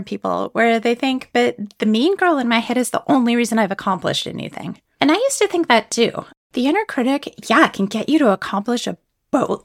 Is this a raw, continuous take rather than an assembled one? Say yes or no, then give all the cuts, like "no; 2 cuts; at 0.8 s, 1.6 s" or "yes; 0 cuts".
no; 1 cut; at 6.3 s